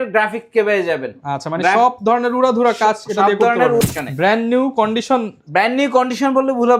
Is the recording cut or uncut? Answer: cut